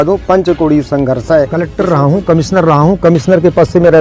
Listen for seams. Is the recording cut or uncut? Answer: cut